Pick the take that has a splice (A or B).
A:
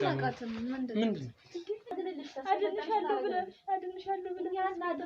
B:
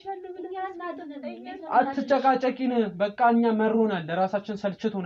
A